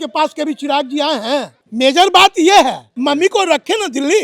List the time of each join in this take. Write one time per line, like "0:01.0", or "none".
0:01.6
0:02.9